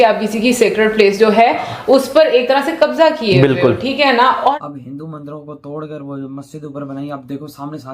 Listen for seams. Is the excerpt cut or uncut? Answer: cut